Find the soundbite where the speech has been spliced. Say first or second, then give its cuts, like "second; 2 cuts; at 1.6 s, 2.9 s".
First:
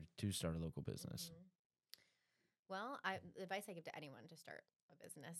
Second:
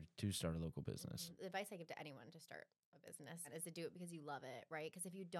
second; 2 cuts; at 1.3 s, 3.5 s